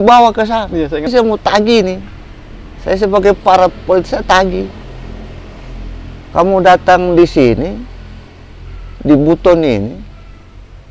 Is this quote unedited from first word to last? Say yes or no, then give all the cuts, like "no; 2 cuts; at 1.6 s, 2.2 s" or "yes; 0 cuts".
no; 1 cut; at 1.1 s